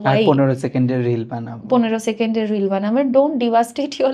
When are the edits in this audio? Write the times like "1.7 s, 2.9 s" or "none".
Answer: none